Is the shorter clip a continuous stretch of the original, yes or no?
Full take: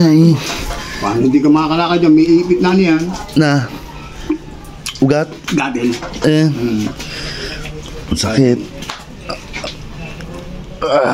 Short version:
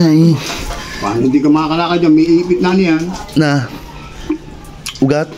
yes